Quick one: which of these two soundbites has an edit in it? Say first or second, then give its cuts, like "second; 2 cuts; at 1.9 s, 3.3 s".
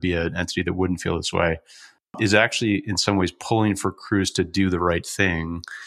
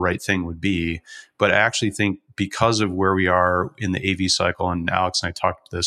first; 1 cut; at 2.1 s